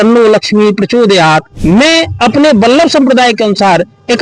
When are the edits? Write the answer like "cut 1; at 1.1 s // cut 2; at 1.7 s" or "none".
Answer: cut 1; at 1.5 s